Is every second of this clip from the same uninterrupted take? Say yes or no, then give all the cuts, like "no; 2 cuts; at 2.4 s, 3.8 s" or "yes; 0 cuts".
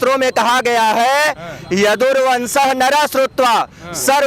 yes; 0 cuts